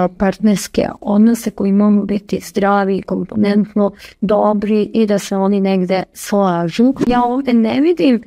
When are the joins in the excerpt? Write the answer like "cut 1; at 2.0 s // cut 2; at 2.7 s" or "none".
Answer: cut 1; at 7.1 s